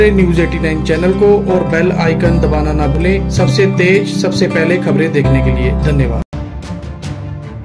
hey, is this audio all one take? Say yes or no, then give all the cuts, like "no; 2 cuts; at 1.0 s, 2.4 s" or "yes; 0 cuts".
no; 1 cut; at 6.3 s